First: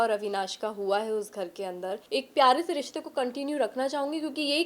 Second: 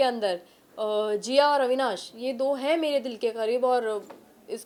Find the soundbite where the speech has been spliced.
first; 1 cut; at 2.0 s

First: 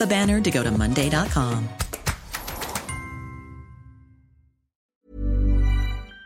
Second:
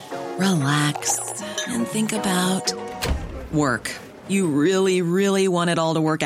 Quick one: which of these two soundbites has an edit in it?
first; 1 cut; at 4.9 s

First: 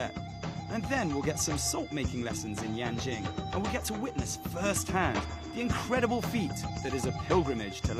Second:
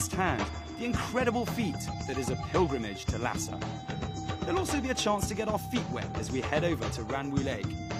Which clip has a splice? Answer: first; 1 cut; at 3.7 s

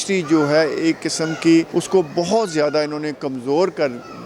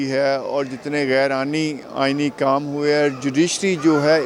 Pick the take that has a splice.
first; 1 cut; at 1.7 s

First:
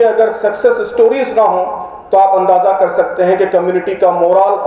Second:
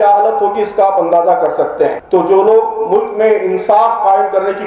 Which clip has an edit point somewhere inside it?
second; 1 cut; at 2.0 s

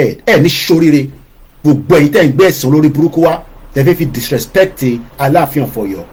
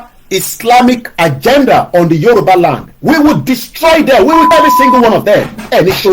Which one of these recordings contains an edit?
second; 1 cut; at 4.5 s

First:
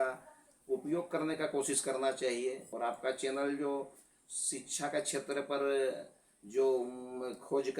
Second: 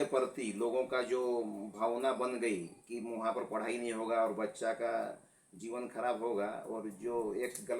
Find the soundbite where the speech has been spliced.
first; 1 cut; at 2.7 s

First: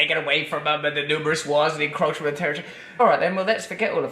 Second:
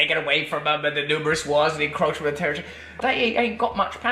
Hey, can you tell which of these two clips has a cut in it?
second; 1 cut; at 2.9 s

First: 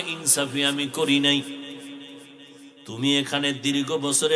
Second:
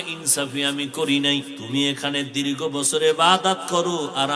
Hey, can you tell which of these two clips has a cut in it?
second; 1 cut; at 1.6 s

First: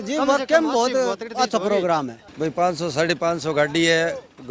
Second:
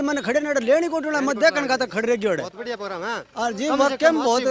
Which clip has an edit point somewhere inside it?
first; 1 cut; at 2.2 s

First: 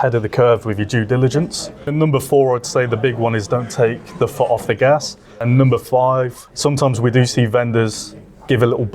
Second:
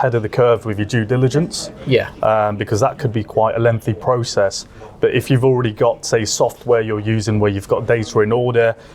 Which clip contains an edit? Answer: first; 3 cuts; at 1.9 s, 5.4 s, 6.4 s

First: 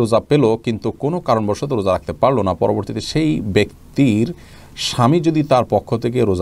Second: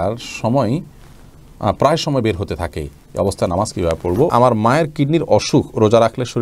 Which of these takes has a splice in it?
second; 1 cut; at 4.3 s

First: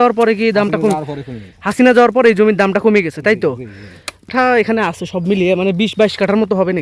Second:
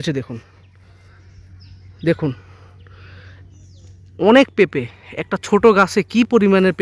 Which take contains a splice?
first; 1 cut; at 4.3 s

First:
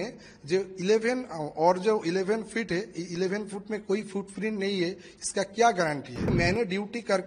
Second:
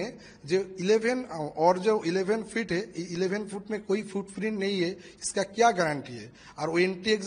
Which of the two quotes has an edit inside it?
first; 1 cut; at 6.3 s

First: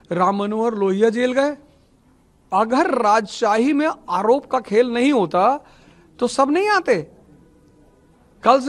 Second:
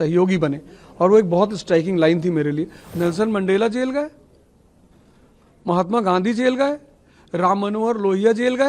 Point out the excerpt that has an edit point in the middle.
second; 1 cut; at 2.8 s

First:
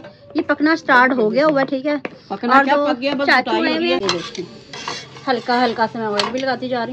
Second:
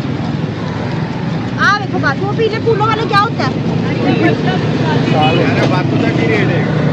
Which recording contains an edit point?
first; 1 cut; at 4.0 s

